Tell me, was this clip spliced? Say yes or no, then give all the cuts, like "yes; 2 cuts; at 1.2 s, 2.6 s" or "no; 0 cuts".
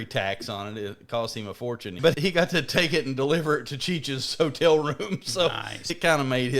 yes; 2 cuts; at 2.1 s, 5.9 s